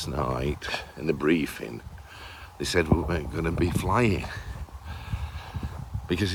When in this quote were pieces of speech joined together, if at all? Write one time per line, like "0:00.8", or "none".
none